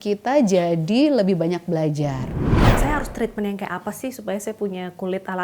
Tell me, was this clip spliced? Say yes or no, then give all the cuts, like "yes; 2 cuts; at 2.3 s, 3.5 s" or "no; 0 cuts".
yes; 1 cut; at 2.6 s